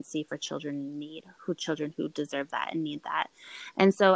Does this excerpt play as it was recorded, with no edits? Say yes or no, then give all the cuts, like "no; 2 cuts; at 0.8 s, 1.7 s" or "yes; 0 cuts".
yes; 0 cuts